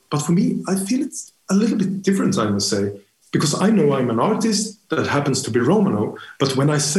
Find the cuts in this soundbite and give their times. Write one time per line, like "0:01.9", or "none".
none